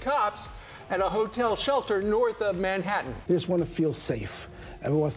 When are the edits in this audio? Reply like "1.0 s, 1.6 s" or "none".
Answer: none